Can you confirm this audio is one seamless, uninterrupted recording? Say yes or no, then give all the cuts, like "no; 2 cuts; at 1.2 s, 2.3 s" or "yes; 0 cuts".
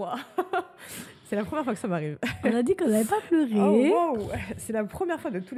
yes; 0 cuts